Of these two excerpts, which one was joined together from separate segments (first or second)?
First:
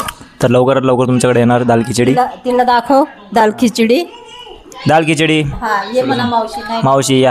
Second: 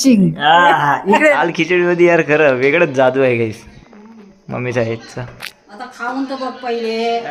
second